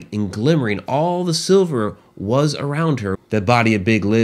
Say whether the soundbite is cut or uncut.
cut